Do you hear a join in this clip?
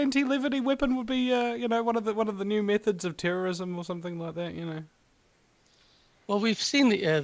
no; 0 cuts

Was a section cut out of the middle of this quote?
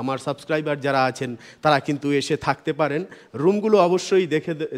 no; 0 cuts

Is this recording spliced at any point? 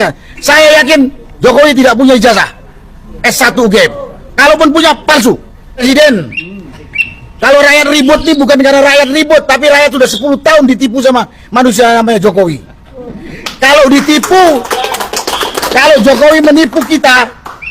yes; 2 cuts; at 5.8 s, 15.8 s

